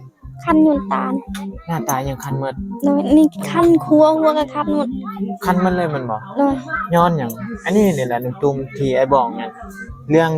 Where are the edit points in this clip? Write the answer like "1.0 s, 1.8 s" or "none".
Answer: none